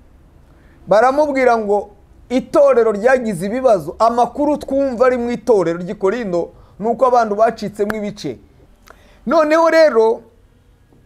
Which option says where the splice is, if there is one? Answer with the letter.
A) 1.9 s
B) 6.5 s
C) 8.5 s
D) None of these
C